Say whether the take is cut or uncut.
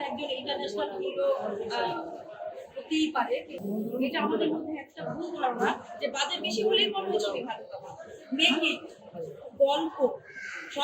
cut